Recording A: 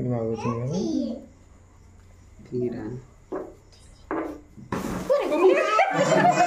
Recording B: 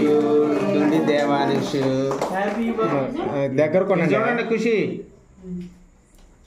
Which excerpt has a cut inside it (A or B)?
B